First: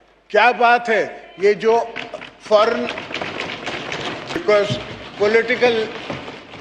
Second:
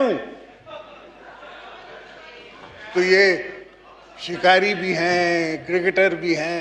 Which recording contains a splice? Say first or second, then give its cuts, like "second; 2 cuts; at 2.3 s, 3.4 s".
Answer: first; 1 cut; at 4.4 s